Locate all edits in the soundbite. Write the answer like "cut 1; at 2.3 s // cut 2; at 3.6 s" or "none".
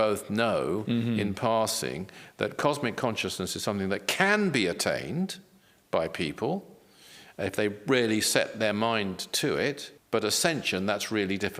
cut 1; at 9.9 s